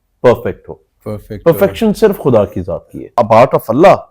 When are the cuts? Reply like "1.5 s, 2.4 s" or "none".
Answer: 3.0 s